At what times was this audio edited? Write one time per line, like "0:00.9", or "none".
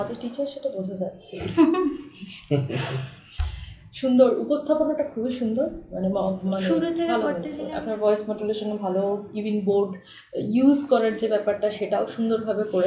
0:07.3